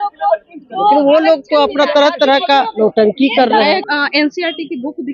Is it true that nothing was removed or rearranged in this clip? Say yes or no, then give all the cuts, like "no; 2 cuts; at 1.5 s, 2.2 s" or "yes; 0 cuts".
no; 1 cut; at 3.8 s